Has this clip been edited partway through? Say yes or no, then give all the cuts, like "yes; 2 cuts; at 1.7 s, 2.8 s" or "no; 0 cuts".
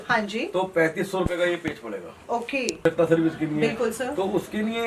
yes; 1 cut; at 2.8 s